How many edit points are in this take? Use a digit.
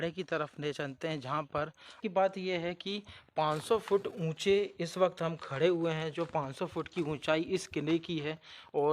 1